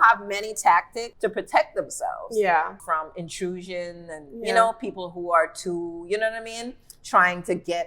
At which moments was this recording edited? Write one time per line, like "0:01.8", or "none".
0:01.0
0:02.7